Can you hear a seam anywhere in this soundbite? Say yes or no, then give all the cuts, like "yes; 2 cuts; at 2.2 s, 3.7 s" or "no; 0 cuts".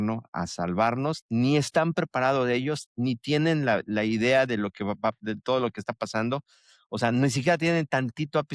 no; 0 cuts